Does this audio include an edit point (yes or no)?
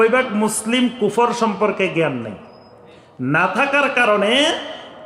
no